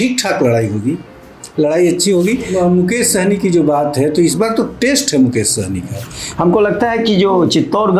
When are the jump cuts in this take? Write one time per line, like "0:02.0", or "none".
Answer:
0:02.5
0:06.2